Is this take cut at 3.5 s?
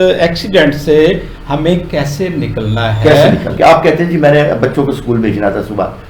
yes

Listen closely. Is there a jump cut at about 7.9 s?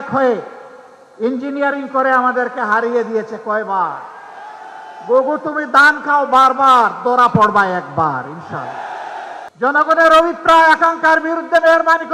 no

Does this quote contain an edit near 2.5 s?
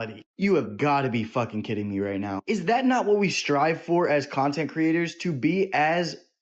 no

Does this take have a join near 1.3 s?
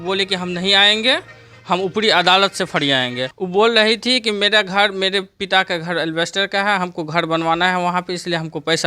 no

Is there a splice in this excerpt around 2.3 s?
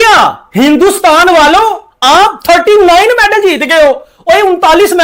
no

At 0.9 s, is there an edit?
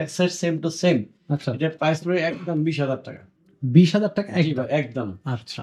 no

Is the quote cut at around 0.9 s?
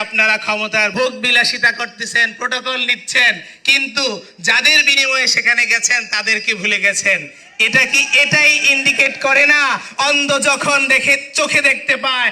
yes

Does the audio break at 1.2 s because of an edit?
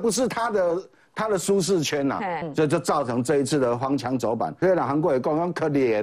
no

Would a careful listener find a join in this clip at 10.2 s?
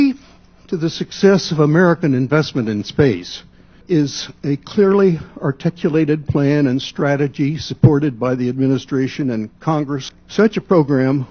yes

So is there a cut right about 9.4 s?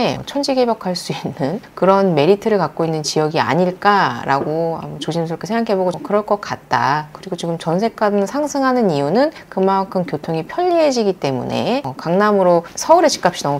no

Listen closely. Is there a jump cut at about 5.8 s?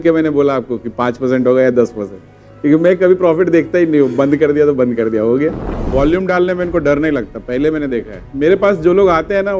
yes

